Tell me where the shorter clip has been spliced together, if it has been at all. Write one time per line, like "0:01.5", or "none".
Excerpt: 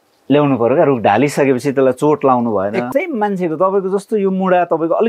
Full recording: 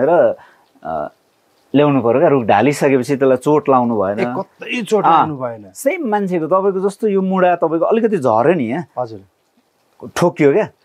0:02.9